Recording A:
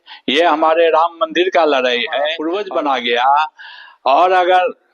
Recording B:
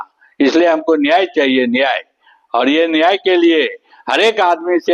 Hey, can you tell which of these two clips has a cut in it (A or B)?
A